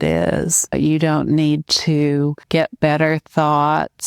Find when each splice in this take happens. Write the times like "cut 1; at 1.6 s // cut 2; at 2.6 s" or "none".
cut 1; at 0.7 s // cut 2; at 2.4 s